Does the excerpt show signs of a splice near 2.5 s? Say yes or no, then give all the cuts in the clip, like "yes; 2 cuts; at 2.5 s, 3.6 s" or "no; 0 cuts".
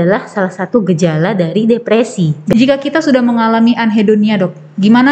yes; 1 cut; at 2.5 s